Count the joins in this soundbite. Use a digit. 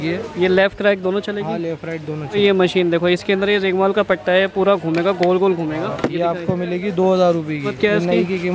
3